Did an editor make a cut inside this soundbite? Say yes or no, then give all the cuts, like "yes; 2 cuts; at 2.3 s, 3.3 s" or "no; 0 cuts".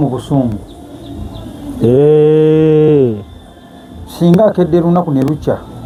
no; 0 cuts